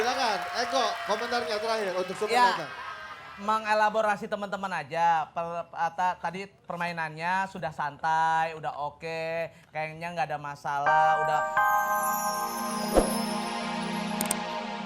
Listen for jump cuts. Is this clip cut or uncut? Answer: cut